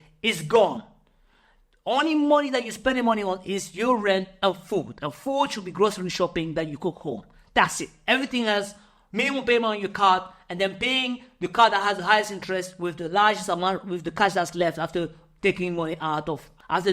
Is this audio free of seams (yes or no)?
yes